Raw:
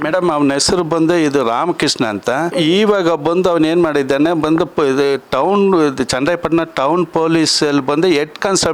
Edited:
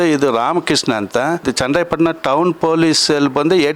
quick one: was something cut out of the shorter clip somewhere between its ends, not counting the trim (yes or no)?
yes